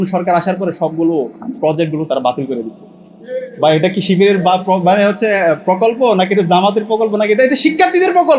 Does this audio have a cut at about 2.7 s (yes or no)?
no